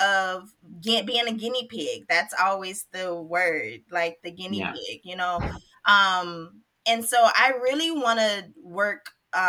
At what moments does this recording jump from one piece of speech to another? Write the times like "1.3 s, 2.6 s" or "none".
none